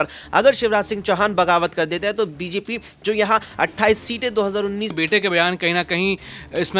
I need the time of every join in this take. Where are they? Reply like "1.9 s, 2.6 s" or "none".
4.9 s